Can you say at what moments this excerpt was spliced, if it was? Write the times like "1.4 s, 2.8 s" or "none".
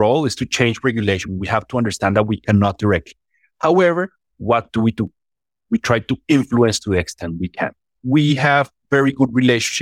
1.3 s, 7.9 s